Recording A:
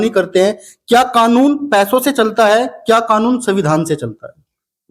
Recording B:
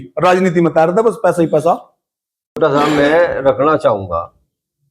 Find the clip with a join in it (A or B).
B